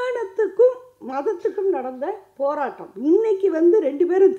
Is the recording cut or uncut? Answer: uncut